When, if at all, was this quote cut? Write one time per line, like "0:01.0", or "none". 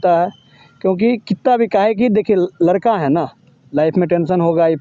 none